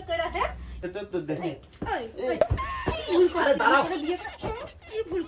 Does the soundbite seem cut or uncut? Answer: uncut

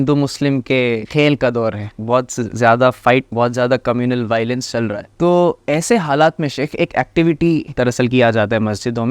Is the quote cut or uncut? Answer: cut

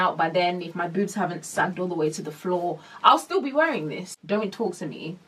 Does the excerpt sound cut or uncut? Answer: cut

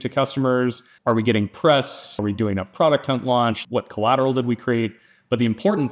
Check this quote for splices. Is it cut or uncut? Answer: cut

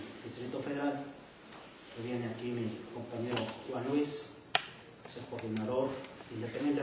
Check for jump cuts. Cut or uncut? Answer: cut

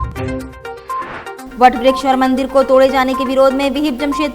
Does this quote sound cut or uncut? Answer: uncut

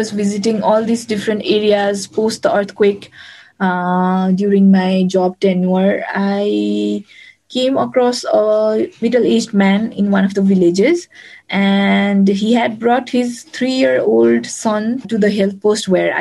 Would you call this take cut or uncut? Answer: uncut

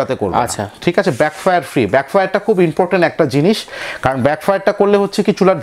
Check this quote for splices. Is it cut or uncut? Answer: uncut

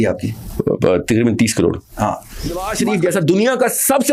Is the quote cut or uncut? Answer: cut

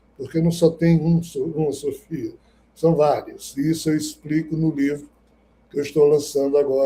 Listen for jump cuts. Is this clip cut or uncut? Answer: uncut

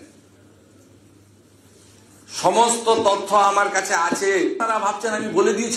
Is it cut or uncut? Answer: cut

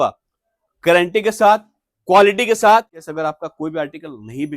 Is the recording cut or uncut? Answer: cut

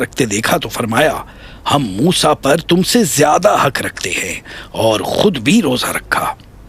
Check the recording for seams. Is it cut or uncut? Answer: uncut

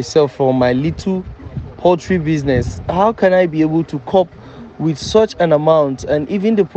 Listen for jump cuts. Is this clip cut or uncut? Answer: uncut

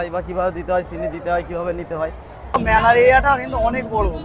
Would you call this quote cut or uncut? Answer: cut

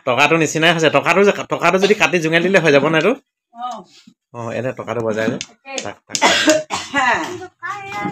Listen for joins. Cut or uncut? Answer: uncut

